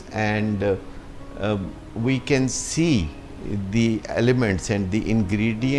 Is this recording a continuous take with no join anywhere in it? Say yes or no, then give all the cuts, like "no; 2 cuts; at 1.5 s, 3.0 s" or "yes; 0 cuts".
yes; 0 cuts